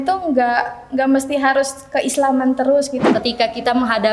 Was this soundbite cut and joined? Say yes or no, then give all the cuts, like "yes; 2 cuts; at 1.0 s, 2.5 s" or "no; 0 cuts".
yes; 1 cut; at 3.1 s